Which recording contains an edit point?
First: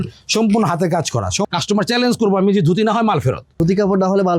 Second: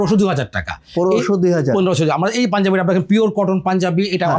first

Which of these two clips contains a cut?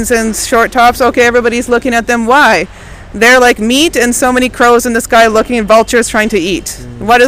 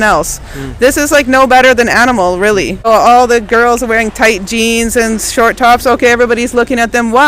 second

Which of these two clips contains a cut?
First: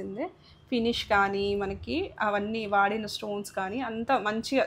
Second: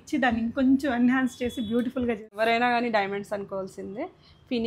second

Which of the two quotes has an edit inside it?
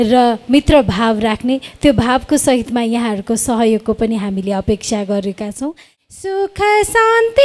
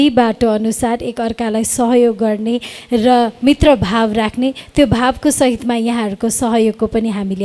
first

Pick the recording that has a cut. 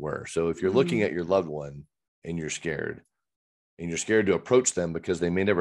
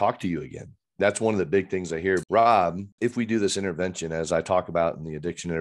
second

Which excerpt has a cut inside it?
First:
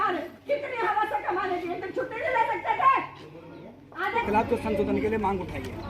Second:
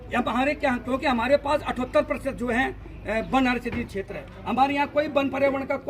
first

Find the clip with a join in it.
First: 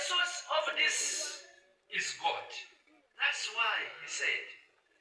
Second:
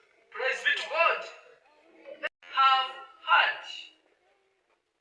second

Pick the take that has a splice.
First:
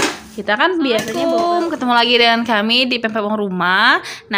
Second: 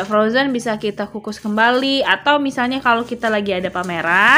first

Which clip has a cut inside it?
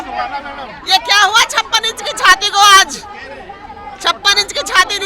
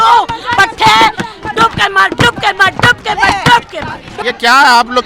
second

